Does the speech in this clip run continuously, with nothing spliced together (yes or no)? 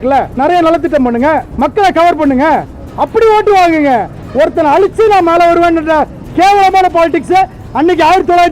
yes